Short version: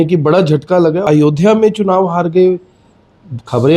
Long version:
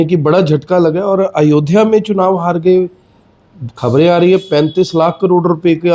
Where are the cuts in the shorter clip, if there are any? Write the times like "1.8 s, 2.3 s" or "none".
1.0 s